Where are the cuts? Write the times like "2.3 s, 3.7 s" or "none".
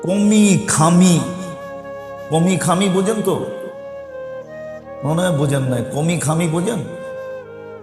3.5 s, 5.0 s, 7.1 s